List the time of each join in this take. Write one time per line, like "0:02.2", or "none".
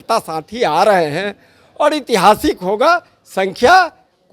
none